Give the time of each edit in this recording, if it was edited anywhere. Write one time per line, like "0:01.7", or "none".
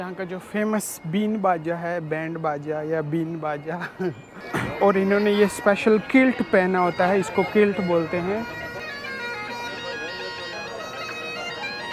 0:04.3
0:08.8

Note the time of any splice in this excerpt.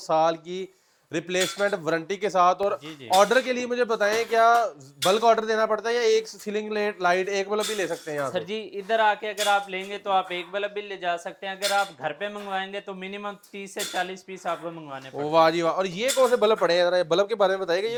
none

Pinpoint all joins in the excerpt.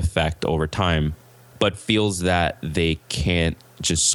none

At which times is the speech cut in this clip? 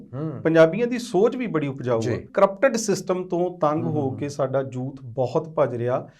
0:02.3

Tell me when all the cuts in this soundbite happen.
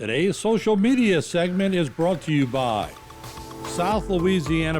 0:03.6

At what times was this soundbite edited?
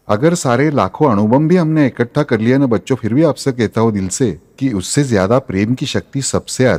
none

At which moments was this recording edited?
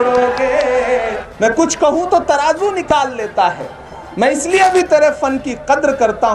0:01.2

